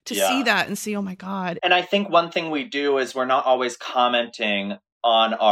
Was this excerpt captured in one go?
no; 1 cut; at 1.6 s

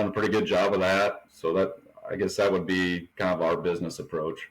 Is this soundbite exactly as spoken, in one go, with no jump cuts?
no; 2 cuts; at 1.3 s, 3.1 s

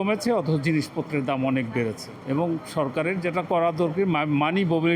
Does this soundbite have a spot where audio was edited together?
no; 0 cuts

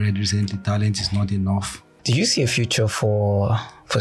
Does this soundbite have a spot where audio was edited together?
yes; 1 cut; at 2.0 s

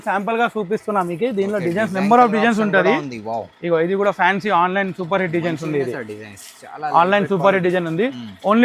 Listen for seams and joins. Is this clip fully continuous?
yes; 0 cuts

